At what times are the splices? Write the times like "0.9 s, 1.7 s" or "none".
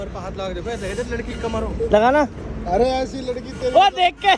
none